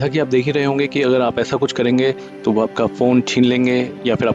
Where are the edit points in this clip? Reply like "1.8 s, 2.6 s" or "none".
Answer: none